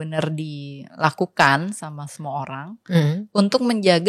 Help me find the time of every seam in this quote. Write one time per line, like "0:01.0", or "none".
none